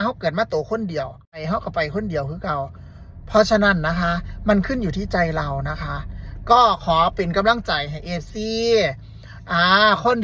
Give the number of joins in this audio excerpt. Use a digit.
1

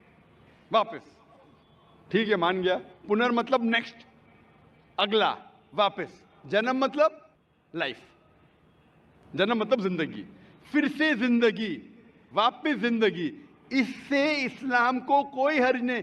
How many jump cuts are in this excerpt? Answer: 0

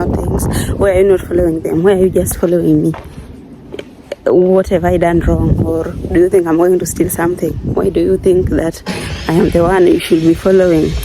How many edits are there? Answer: 0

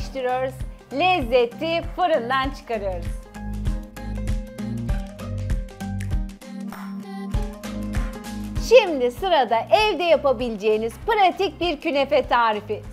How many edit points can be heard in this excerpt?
2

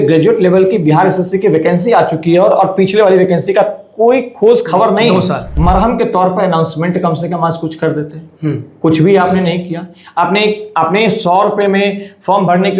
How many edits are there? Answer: 1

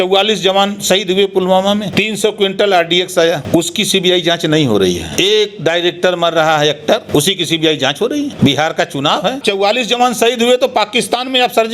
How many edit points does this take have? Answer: 6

